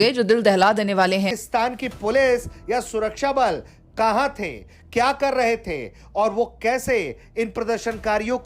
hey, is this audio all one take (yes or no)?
no